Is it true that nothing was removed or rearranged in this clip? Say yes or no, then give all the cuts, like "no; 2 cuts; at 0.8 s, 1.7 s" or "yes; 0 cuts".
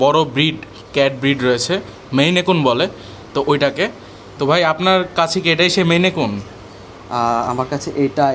yes; 0 cuts